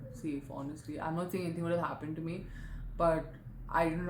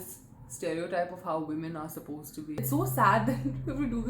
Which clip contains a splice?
second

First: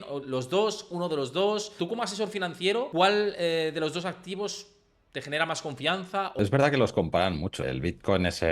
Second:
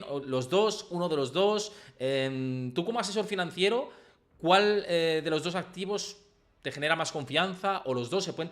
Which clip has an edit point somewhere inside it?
first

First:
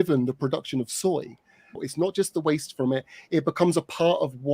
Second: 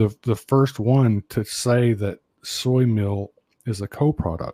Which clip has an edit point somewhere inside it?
first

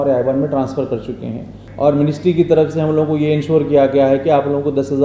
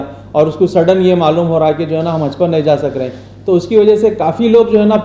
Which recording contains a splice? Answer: first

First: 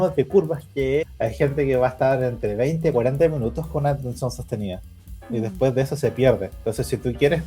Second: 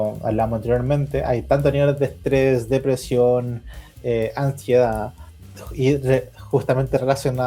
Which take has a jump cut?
first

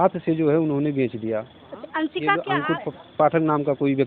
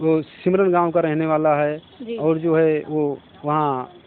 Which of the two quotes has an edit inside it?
first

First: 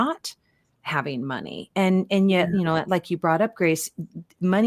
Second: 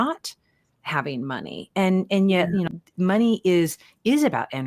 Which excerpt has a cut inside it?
second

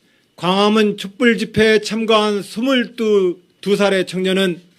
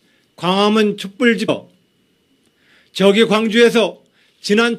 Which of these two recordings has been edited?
first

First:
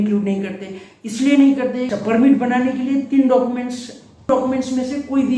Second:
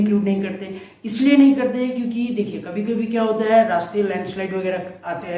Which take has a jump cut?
first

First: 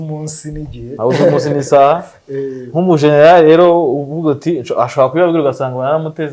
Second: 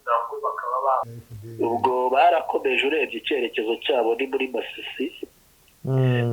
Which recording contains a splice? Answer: second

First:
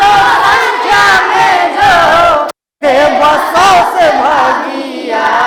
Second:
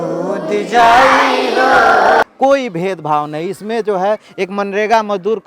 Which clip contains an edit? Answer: second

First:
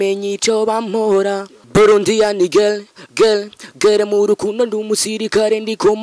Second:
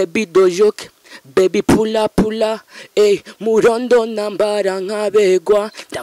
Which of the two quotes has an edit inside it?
first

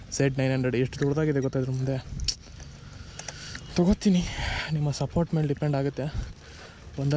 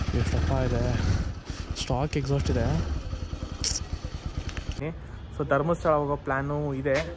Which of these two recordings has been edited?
second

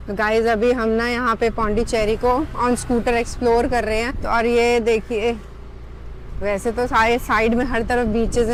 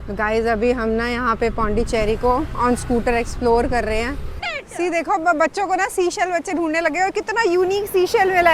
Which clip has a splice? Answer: second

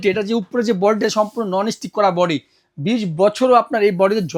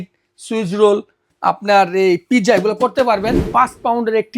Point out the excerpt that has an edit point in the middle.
second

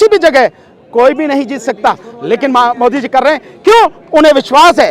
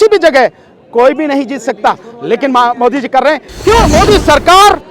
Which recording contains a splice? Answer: second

